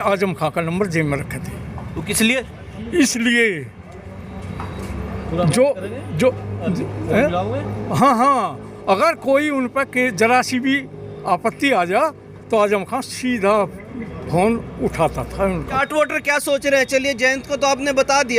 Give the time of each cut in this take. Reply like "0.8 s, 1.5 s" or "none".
15.7 s